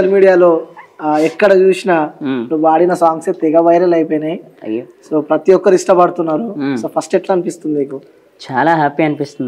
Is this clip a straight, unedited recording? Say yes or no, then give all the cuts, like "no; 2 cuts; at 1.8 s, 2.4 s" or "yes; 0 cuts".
yes; 0 cuts